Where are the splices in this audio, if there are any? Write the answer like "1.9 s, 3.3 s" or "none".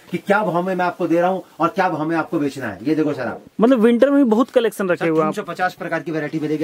3.4 s